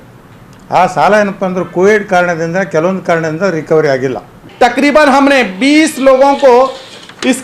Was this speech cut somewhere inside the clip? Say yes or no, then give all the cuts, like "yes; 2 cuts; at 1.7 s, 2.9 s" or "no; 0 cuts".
yes; 1 cut; at 4.4 s